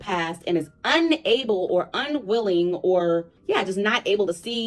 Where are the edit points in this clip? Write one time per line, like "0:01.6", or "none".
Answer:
0:03.3